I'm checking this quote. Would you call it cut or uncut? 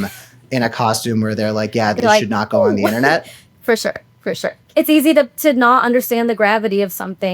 cut